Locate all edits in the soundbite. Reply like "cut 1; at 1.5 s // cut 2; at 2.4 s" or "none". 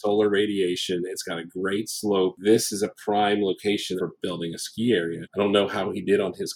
cut 1; at 2.4 s // cut 2; at 4.0 s // cut 3; at 5.2 s